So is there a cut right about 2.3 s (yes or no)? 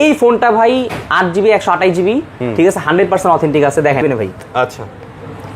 no